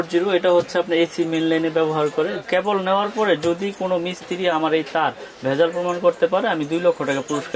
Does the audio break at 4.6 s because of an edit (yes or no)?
yes